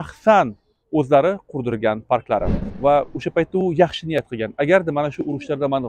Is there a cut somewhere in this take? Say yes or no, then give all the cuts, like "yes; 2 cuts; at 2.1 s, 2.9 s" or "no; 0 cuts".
yes; 1 cut; at 2.6 s